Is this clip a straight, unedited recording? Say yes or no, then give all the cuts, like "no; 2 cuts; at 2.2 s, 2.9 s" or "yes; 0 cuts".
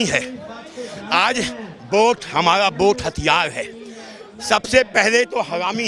yes; 0 cuts